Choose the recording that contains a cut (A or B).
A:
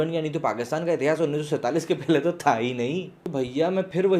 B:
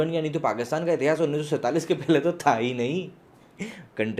A